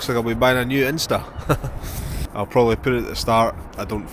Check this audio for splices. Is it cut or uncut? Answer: cut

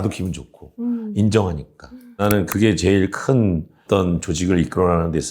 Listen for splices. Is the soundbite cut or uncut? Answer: cut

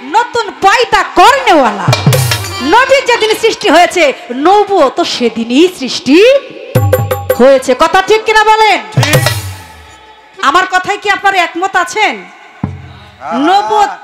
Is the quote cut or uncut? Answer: uncut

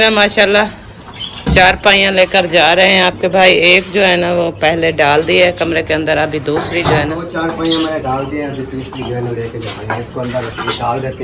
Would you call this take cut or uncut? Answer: cut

